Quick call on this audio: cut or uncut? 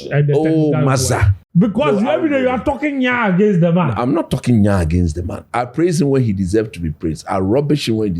cut